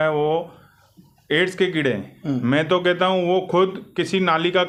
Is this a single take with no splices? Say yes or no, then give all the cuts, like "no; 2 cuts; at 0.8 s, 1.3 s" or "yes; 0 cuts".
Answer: yes; 0 cuts